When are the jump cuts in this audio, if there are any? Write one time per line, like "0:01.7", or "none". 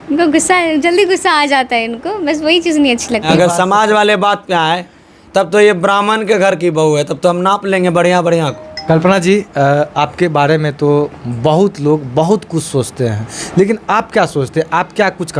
0:03.3
0:08.8
0:13.3